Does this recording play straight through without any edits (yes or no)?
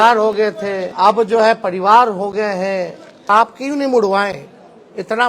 no